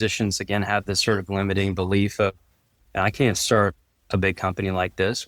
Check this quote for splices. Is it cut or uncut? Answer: uncut